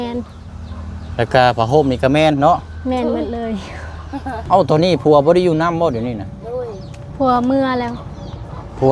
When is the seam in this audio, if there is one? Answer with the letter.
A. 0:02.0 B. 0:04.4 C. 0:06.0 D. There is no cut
B